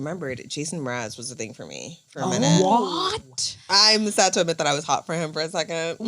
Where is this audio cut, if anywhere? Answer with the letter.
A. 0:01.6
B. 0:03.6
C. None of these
B